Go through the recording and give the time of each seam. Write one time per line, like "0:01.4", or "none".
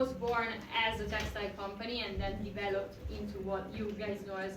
none